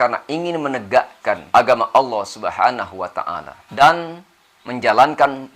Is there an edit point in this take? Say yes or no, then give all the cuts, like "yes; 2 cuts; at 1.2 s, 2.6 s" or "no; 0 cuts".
yes; 2 cuts; at 1.4 s, 3.8 s